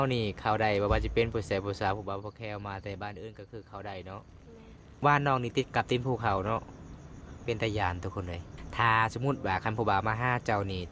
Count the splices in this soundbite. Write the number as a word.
two